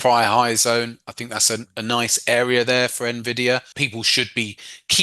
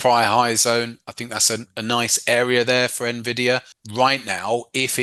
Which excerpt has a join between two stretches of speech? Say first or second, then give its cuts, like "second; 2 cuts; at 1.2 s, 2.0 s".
first; 1 cut; at 3.8 s